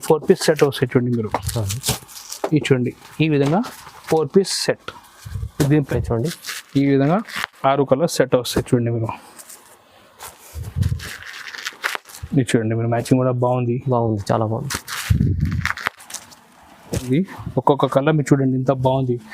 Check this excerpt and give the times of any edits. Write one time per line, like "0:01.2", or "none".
0:05.9
0:17.1